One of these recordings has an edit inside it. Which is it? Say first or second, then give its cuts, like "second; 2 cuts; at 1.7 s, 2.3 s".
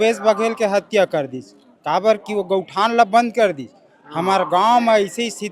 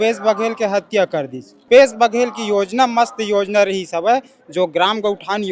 second; 1 cut; at 1.6 s